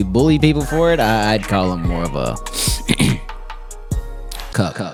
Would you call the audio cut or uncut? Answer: uncut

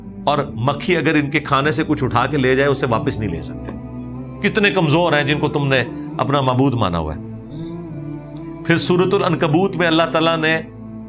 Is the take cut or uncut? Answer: uncut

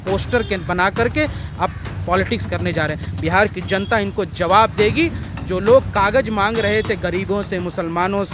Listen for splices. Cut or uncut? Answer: uncut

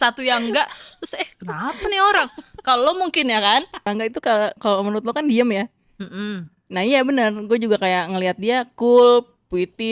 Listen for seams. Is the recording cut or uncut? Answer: cut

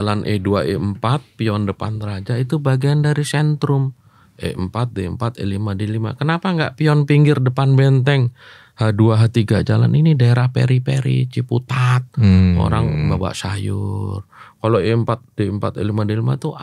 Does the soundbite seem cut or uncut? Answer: uncut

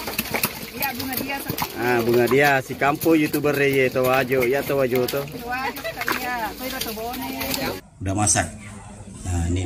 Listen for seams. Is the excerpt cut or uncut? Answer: cut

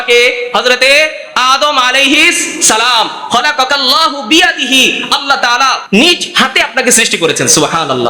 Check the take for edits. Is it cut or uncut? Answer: cut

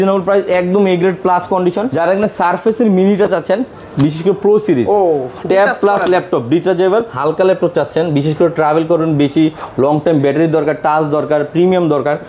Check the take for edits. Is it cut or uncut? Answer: cut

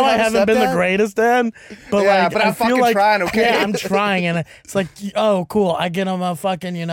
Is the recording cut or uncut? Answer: uncut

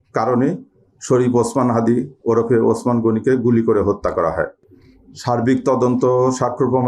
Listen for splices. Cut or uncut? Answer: uncut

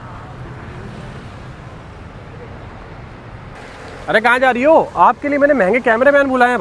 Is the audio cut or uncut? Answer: cut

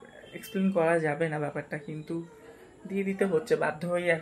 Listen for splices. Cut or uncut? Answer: uncut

